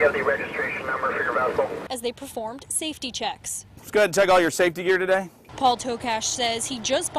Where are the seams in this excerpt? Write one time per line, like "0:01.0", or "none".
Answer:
0:04.0